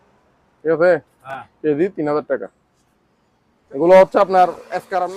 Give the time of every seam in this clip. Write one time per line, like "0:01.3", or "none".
none

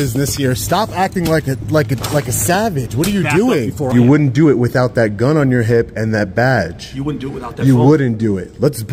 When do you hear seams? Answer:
0:03.8

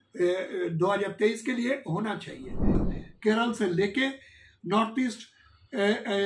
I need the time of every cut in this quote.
0:02.9

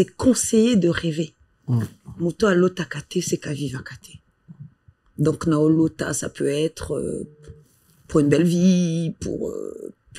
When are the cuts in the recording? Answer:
none

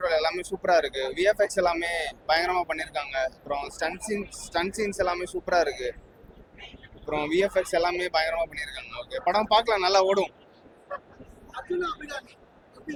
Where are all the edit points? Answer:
none

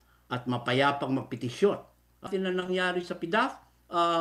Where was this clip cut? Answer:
0:02.3

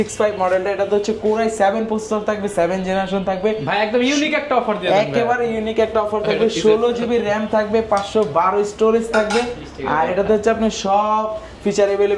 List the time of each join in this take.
none

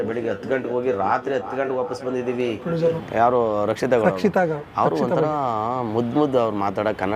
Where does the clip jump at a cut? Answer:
0:03.0

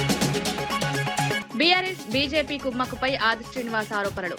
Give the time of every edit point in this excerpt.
0:01.4

